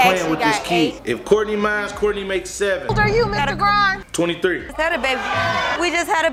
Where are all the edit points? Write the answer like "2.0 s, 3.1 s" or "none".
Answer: none

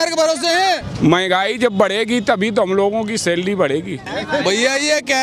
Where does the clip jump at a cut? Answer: 0.9 s, 4.1 s

